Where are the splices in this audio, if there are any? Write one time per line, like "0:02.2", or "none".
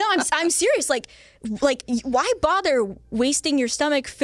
none